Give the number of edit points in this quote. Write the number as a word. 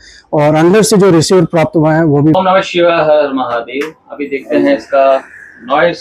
one